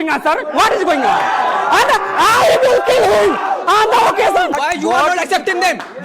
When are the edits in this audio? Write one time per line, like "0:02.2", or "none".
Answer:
0:04.6